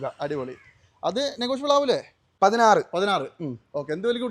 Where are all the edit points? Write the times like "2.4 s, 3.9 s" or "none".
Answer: 2.2 s

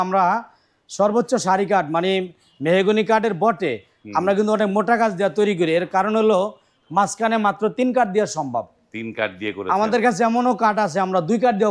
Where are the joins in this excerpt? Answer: none

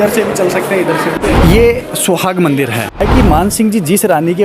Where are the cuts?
1.2 s, 3.0 s

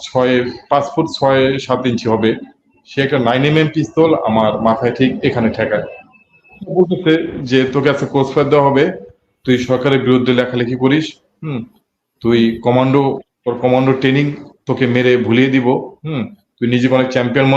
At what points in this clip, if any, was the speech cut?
6.6 s

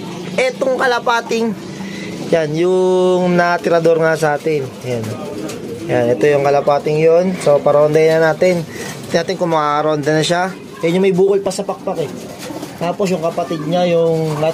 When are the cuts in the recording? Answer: none

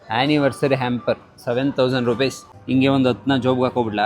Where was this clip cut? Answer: 2.5 s

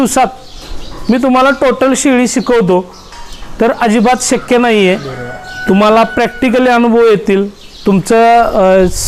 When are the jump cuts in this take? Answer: none

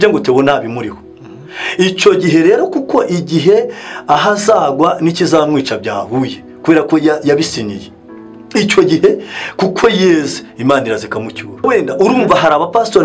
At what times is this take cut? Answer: 11.6 s

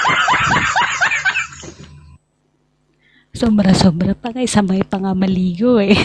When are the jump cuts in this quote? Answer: 1.2 s

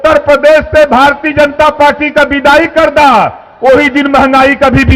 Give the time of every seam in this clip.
none

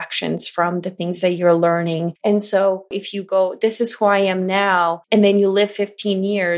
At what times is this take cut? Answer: 2.1 s, 3.0 s, 5.0 s

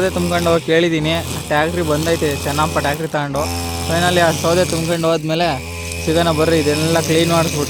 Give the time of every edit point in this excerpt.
none

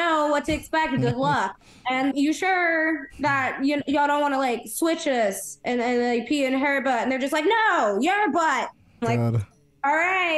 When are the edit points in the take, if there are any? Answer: 2.1 s

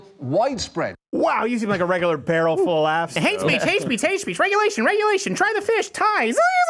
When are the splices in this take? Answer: 3.2 s

